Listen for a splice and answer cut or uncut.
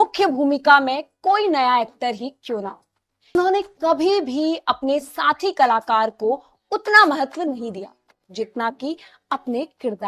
cut